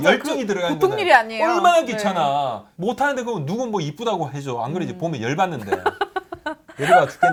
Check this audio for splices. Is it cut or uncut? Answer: uncut